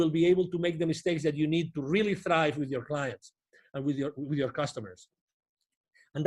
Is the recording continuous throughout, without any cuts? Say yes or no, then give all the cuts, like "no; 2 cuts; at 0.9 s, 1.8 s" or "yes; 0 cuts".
yes; 0 cuts